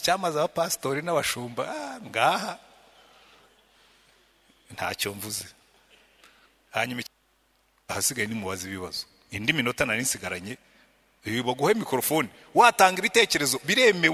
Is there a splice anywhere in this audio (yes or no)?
yes